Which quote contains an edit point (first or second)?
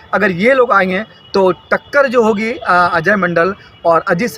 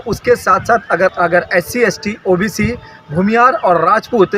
second